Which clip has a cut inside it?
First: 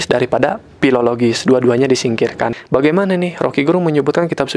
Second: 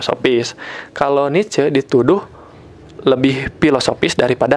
first; 1 cut; at 2.6 s

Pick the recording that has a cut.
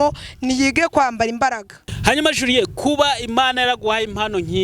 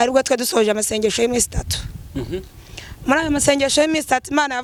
first; 1 cut; at 1.9 s

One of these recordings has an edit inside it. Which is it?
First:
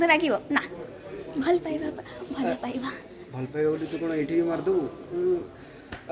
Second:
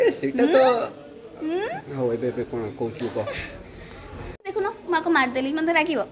second; 1 cut; at 4.5 s

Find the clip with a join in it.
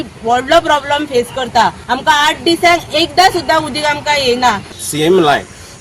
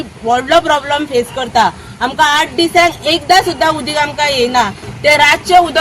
first; 2 cuts; at 1.8 s, 4.7 s

